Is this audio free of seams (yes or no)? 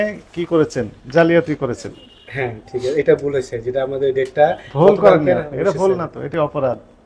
yes